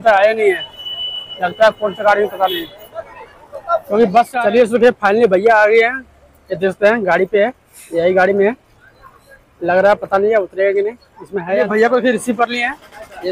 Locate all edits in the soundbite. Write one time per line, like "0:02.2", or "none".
0:04.4
0:11.5